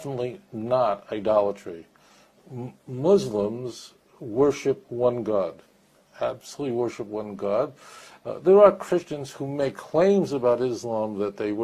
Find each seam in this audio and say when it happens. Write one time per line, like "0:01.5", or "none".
none